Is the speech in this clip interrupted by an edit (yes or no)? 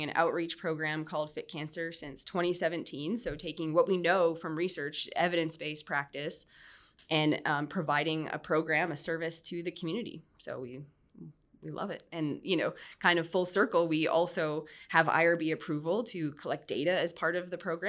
no